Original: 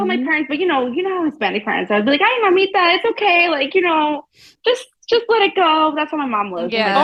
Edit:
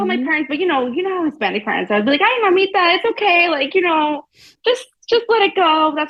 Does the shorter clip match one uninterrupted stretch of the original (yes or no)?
yes